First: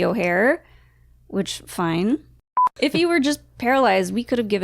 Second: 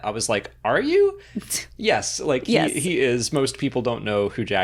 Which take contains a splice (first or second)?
first